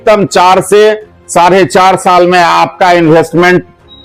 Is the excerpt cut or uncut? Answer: uncut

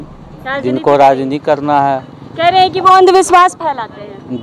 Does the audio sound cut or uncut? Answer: uncut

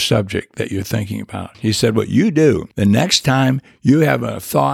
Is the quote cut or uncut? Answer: cut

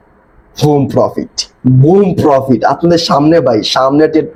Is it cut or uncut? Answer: uncut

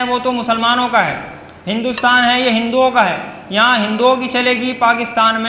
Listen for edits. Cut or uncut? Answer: uncut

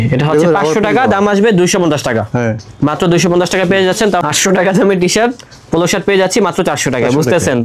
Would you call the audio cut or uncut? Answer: cut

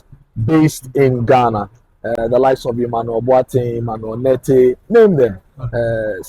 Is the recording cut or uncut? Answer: uncut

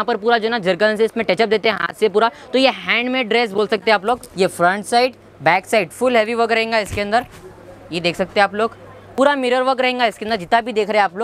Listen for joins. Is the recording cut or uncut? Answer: cut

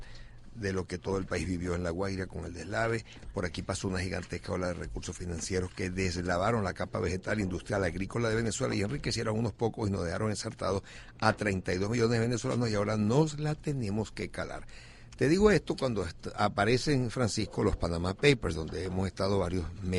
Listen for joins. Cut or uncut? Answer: cut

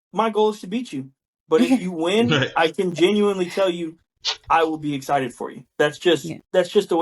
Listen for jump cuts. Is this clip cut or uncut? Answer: uncut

